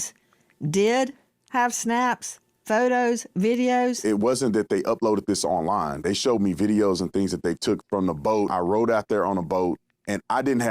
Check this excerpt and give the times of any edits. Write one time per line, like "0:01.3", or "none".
0:04.0
0:08.5